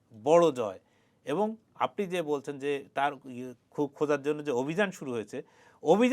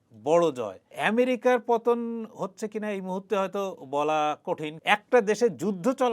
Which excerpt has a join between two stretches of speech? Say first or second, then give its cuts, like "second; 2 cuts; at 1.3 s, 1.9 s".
second; 2 cuts; at 0.9 s, 4.7 s